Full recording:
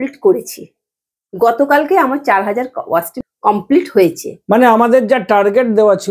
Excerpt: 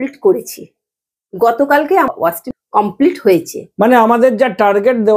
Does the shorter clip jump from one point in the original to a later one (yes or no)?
yes